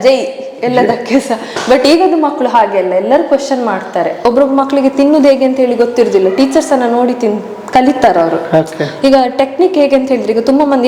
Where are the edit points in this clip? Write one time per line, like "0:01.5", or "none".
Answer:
0:04.2